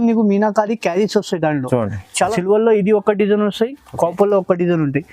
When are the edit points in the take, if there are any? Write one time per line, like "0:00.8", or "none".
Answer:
0:02.3

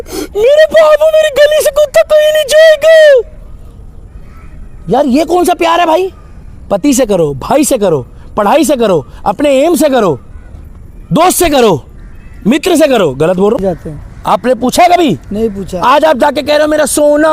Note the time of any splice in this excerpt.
0:13.6

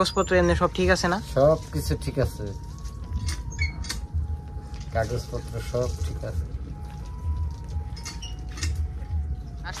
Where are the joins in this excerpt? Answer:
none

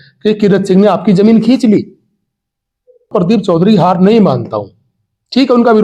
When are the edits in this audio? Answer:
0:03.1

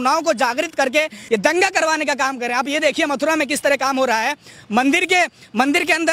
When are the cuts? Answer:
0:01.2

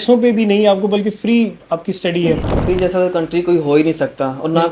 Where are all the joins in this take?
0:02.6

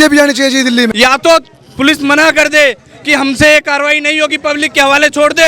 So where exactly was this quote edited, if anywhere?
0:00.9

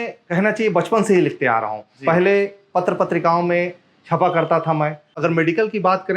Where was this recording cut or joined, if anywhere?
0:05.1

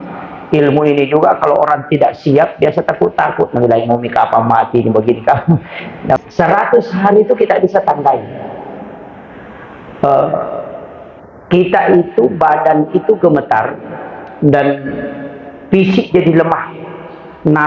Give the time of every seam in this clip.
0:06.2

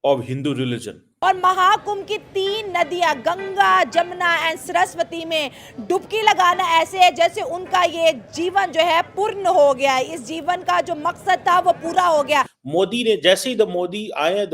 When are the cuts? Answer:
0:01.0
0:12.6

